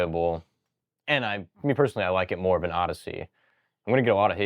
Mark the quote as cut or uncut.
uncut